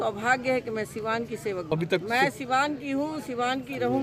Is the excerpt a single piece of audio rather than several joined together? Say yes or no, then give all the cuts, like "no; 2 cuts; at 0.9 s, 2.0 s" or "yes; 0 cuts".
no; 1 cut; at 1.7 s